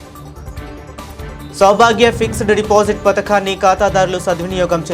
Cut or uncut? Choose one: cut